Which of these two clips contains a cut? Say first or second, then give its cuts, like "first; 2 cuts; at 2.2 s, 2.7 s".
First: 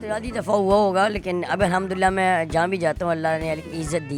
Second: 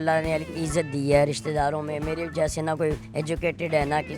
second; 1 cut; at 3.0 s